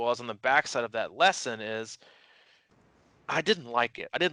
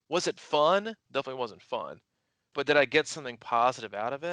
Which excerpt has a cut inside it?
second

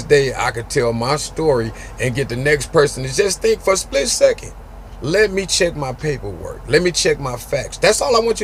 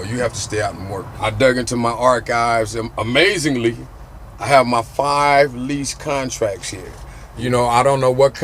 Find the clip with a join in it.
second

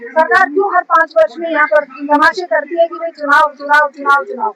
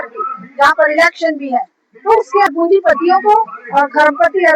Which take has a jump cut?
second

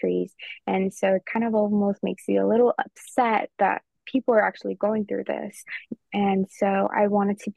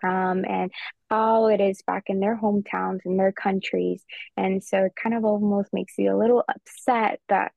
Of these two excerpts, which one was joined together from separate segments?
first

